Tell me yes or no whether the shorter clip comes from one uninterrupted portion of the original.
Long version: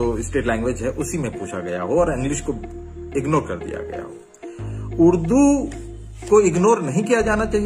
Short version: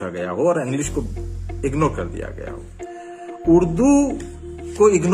yes